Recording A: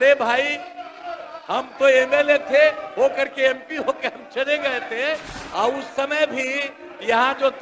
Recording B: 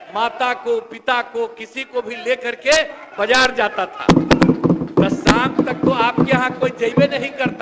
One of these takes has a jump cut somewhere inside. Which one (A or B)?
A